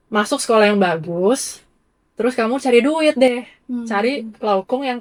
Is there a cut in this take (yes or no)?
no